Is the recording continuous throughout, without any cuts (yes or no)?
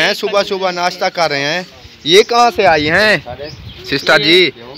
yes